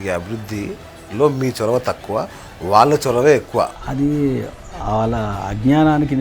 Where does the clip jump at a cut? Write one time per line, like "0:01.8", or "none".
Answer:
0:03.8

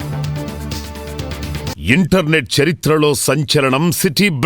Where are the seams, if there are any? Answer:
0:01.7

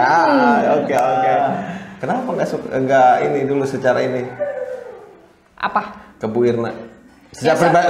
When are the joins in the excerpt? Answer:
0:01.1

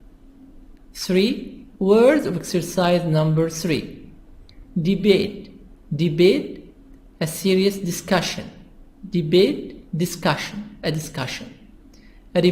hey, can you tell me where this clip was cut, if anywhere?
0:10.1

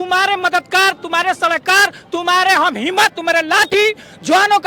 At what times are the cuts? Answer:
none

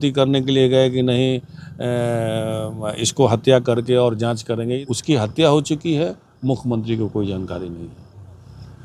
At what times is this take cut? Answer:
0:04.8

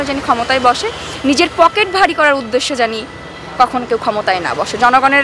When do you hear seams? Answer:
none

